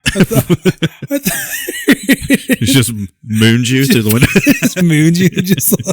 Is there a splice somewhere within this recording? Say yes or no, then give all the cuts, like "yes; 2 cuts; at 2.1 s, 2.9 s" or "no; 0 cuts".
yes; 1 cut; at 4.8 s